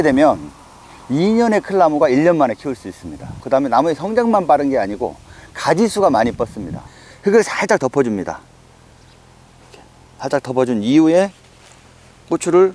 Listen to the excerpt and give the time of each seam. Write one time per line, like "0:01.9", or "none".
0:06.8